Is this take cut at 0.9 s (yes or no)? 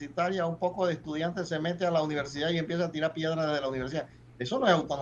no